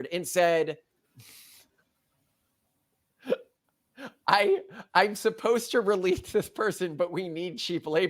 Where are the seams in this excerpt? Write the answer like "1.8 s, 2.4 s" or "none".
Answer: none